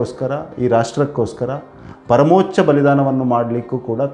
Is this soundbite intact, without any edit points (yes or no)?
yes